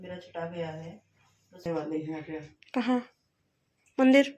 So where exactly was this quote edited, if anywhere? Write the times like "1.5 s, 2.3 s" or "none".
1.7 s